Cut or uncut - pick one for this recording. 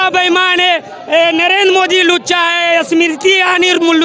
uncut